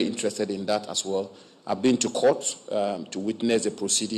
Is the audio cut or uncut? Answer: uncut